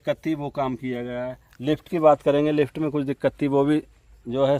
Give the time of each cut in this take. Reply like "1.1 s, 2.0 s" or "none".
none